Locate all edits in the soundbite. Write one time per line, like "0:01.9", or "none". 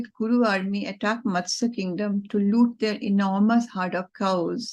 none